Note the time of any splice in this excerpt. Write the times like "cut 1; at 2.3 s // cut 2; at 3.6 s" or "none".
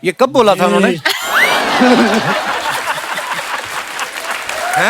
none